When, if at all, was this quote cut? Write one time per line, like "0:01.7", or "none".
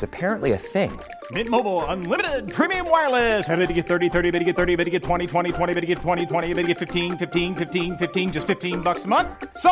none